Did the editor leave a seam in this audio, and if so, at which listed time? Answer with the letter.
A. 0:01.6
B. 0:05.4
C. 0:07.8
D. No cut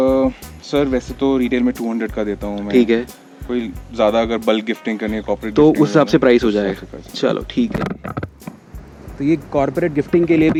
D